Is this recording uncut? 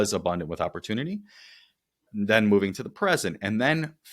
no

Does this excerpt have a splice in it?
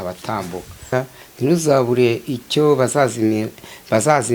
yes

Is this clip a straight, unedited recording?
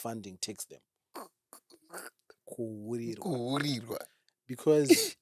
no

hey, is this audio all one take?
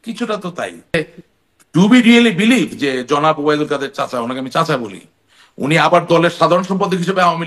no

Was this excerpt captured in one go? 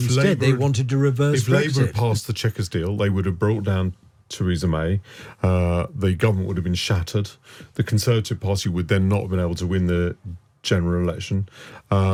yes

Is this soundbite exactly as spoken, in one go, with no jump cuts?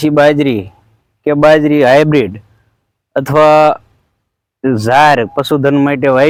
yes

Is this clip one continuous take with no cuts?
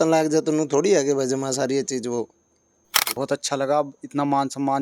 no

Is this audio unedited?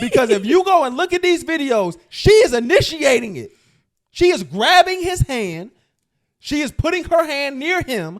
yes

